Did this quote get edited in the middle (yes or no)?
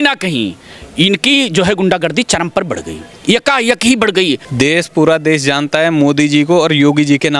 yes